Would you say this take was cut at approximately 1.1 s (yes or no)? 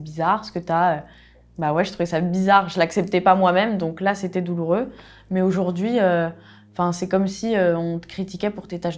no